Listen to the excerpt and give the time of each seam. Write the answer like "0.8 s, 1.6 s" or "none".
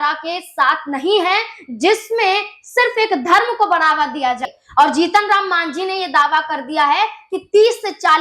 4.5 s